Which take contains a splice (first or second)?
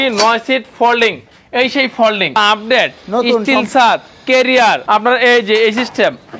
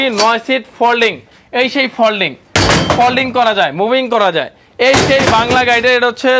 first